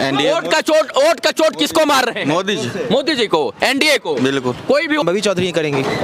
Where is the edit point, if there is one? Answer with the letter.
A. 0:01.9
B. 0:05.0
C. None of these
B